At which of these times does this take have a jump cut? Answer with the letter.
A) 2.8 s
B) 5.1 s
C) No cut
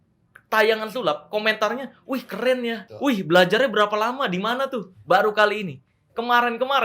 A